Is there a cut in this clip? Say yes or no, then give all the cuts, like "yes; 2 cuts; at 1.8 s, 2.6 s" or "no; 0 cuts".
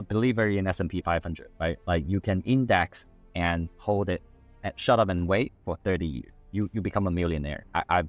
no; 0 cuts